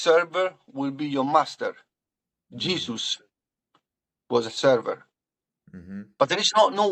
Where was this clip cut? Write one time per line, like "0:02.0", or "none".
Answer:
none